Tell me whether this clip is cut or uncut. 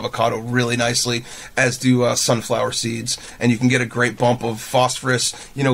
uncut